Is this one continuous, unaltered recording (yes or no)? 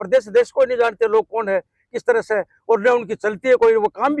yes